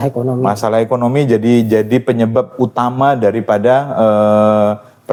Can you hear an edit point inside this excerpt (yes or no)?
no